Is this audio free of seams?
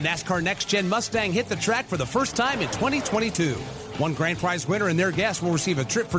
yes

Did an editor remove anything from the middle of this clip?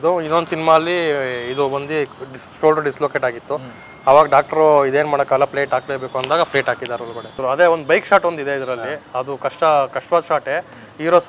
yes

